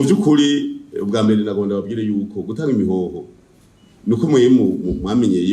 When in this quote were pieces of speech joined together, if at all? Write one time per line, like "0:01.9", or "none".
none